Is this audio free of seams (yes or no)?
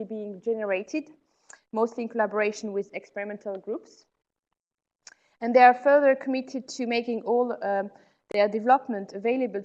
no